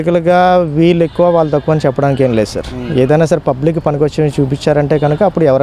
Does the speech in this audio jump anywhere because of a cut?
no; 0 cuts

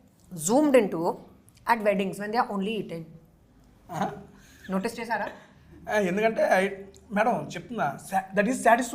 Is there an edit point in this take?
no; 0 cuts

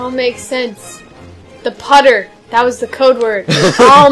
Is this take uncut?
yes; 0 cuts

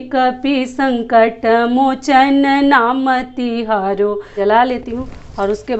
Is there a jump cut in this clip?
yes; 1 cut; at 4.3 s

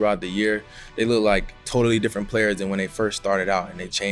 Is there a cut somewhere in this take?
yes; 1 cut; at 1.6 s

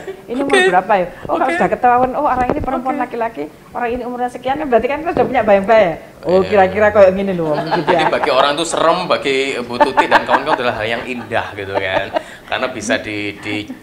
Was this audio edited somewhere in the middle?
yes; 1 cut; at 8.0 s

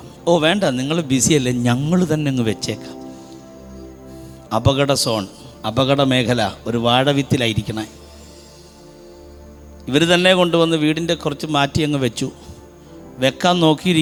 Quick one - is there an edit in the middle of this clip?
no; 0 cuts

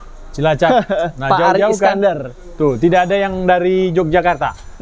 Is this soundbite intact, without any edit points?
yes; 0 cuts

